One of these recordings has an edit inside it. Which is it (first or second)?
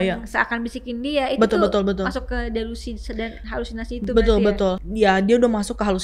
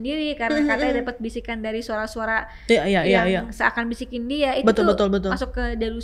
first